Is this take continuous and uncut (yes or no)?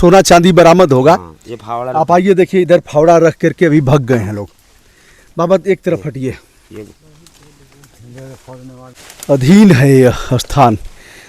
no